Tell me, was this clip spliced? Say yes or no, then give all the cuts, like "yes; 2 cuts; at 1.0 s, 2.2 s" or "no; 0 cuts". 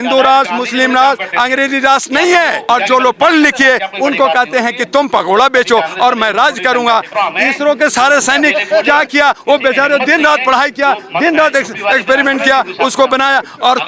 yes; 2 cuts; at 2.6 s, 7.1 s